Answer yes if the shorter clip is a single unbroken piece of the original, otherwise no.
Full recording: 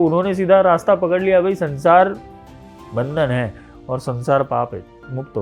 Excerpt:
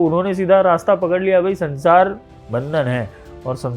no